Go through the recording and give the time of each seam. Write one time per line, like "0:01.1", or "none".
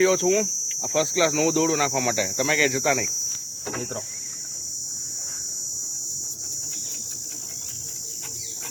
none